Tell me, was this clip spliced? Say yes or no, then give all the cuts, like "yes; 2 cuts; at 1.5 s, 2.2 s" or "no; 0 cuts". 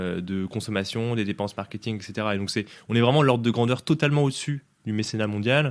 no; 0 cuts